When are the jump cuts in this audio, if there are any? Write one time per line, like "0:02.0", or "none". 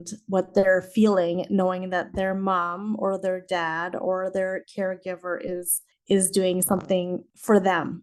none